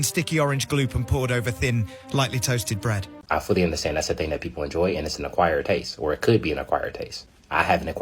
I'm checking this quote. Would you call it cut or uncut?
cut